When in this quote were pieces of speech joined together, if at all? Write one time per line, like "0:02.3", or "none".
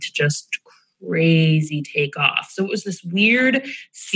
none